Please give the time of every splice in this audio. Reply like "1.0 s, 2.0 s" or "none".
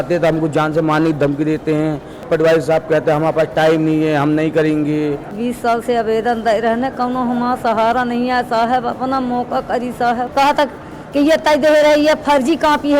2.1 s, 5.4 s, 10.3 s